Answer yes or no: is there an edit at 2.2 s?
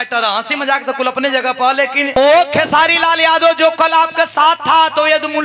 yes